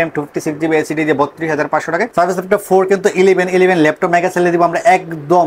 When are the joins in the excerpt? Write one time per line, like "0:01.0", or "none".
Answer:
0:02.1